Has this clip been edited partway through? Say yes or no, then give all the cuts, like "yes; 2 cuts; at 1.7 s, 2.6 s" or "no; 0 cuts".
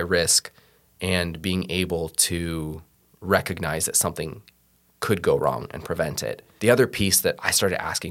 yes; 1 cut; at 6.4 s